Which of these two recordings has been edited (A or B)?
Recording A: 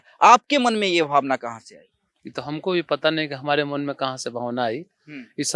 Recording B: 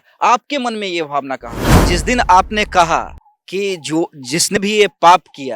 B